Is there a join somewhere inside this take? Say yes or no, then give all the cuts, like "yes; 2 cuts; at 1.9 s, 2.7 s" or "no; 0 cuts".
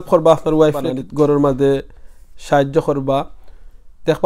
yes; 1 cut; at 1.0 s